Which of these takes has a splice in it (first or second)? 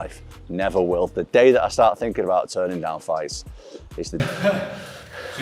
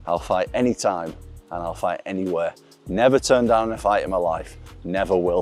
first